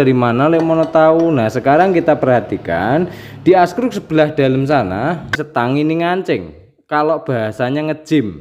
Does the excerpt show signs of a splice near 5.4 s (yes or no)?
yes